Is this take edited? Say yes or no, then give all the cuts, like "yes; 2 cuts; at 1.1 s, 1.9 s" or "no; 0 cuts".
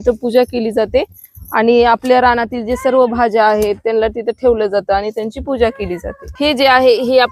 no; 0 cuts